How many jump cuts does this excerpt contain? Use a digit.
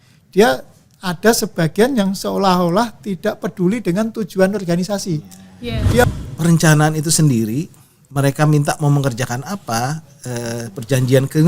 1